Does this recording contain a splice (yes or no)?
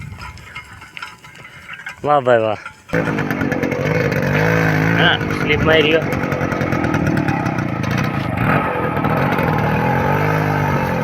yes